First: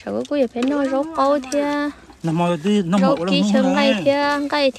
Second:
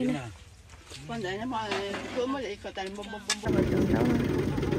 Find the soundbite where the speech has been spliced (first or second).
second